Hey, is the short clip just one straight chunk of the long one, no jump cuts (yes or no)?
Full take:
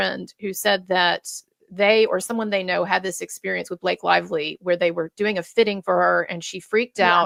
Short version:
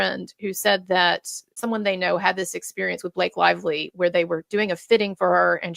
no